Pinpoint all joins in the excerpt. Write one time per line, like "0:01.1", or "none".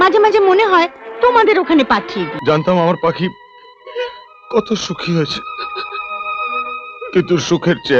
0:02.3